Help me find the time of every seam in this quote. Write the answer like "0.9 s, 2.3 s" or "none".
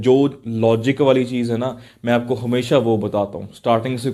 none